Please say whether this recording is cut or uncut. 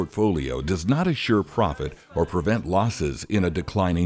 uncut